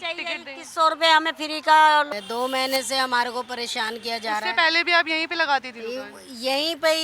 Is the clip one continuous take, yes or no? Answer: no